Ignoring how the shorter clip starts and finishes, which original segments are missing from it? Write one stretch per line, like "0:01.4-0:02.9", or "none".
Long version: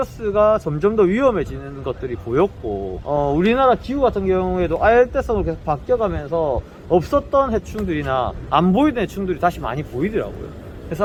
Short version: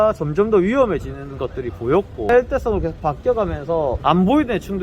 0:02.8-0:04.9
0:06.6-0:08.4